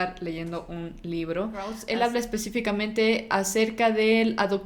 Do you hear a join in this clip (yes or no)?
yes